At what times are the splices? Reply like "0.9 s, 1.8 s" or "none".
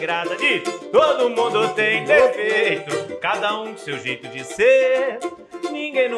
none